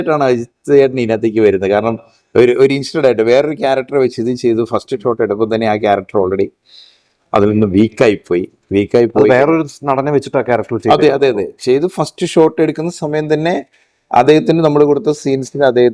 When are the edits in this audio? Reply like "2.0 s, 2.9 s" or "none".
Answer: none